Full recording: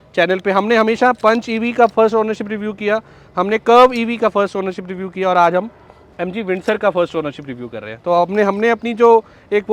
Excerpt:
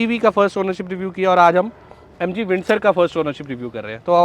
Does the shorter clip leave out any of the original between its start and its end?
no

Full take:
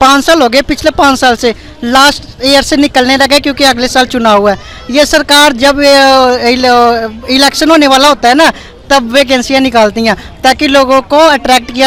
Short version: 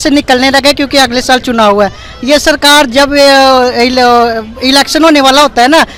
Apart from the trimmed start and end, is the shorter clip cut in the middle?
no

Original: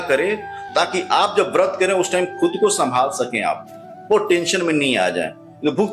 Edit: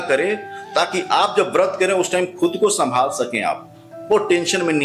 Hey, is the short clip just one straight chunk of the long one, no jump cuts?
yes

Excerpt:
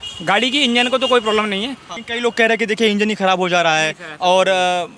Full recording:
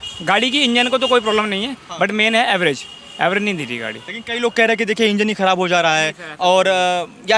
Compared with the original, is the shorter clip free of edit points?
no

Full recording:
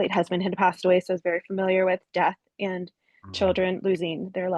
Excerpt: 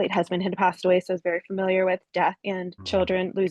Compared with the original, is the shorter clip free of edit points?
no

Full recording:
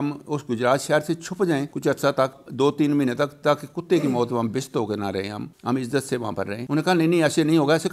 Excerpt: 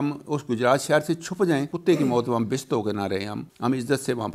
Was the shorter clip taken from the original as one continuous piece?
no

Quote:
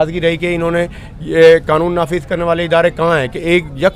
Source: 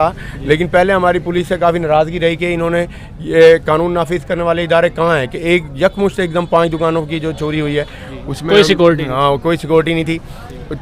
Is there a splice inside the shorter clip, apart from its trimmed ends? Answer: no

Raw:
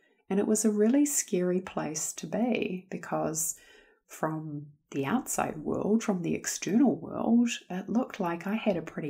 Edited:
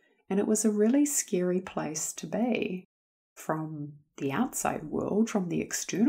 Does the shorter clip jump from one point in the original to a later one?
yes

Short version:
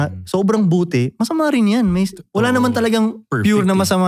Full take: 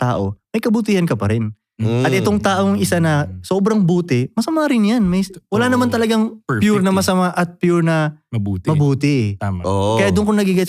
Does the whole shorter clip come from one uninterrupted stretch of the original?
yes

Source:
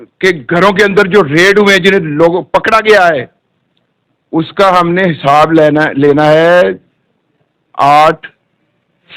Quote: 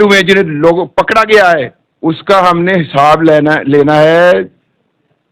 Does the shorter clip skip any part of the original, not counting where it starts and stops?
yes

